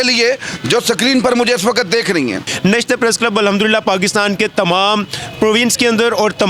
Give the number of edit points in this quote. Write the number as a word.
one